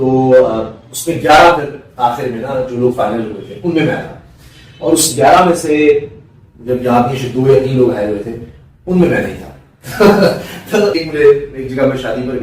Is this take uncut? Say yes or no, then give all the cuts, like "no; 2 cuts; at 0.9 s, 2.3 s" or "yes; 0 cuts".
no; 1 cut; at 11.0 s